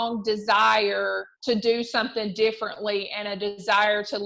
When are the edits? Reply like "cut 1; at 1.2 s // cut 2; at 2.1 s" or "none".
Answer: cut 1; at 1.3 s

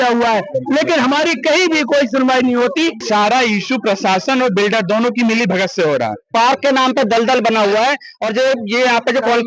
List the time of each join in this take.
cut 1; at 3.0 s // cut 2; at 6.3 s

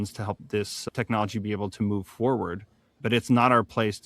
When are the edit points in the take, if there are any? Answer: cut 1; at 3.0 s

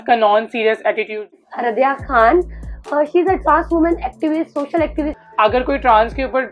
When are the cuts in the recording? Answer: cut 1; at 1.4 s // cut 2; at 5.1 s

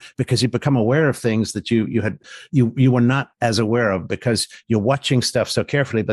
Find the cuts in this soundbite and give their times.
cut 1; at 2.2 s

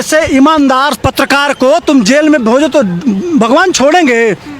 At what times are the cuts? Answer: cut 1; at 0.9 s

